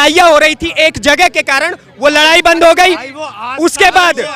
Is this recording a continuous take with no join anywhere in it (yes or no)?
yes